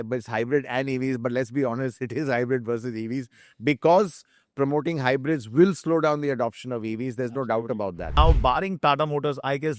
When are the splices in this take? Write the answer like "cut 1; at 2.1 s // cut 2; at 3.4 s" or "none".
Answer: cut 1; at 8.2 s